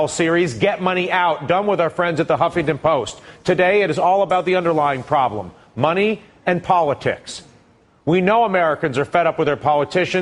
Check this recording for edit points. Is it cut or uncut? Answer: uncut